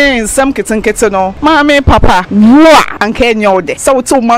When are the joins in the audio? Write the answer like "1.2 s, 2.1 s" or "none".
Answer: 1.3 s, 2.3 s, 3.4 s